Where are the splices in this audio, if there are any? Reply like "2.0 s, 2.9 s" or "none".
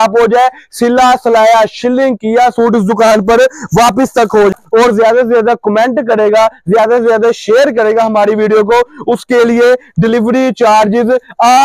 4.5 s

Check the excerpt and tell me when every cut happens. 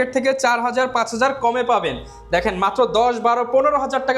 none

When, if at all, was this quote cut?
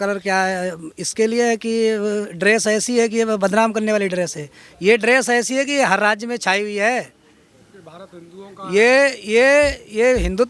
none

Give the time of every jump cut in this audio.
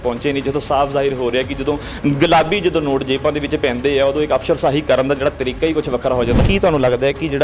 6.4 s

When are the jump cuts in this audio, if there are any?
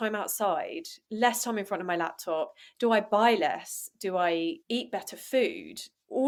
none

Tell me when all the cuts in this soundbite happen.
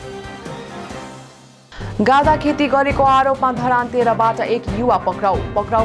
1.5 s

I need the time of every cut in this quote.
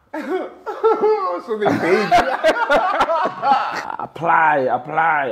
4.0 s

